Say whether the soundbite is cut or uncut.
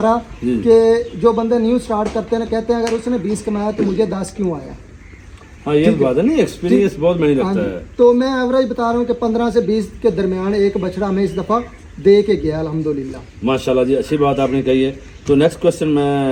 uncut